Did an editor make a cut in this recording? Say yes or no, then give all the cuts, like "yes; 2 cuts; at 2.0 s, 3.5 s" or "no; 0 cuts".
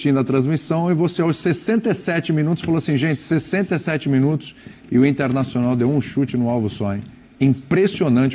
no; 0 cuts